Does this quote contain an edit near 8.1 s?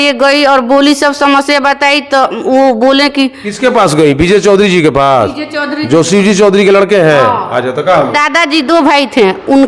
yes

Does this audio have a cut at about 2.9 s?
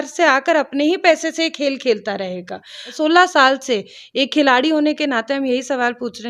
yes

